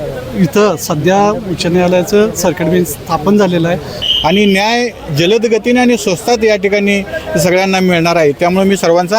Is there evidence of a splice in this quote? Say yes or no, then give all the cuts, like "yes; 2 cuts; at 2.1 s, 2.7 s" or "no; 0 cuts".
yes; 1 cut; at 4.0 s